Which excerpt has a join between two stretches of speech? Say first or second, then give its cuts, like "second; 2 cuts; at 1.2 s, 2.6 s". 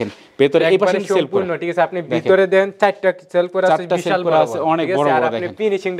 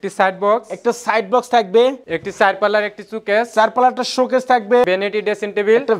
second; 1 cut; at 4.9 s